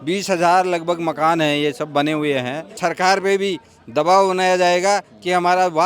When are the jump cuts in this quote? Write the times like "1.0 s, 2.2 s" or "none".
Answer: 2.8 s